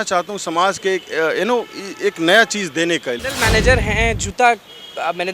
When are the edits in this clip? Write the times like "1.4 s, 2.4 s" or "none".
3.3 s